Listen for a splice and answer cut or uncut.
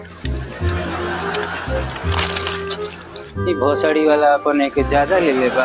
cut